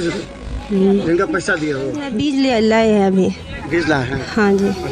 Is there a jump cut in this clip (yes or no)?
yes